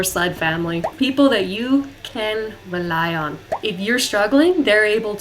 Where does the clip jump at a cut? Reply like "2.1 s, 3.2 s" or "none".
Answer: 0.9 s, 3.4 s